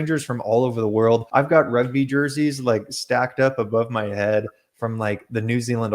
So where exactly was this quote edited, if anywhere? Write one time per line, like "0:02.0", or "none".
0:01.3